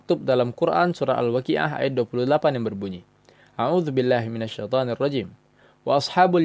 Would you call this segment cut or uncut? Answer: uncut